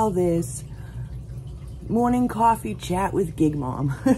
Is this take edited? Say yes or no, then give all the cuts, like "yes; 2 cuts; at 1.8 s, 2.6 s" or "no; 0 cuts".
no; 0 cuts